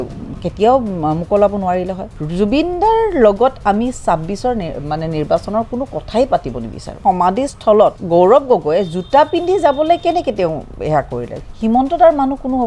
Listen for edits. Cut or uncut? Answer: cut